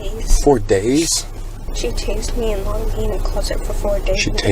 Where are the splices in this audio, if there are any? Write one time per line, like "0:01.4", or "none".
0:01.7